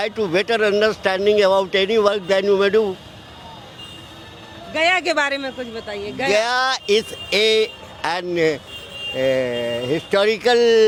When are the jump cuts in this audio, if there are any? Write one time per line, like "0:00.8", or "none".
none